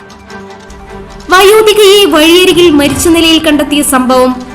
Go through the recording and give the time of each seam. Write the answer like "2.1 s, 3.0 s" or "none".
1.0 s